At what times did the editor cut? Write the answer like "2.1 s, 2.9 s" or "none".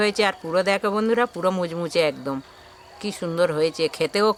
none